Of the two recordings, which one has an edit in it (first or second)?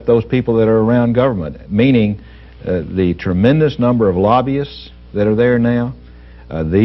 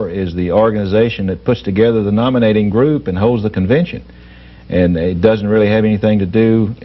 first